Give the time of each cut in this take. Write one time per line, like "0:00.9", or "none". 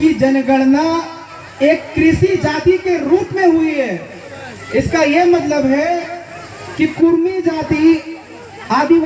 none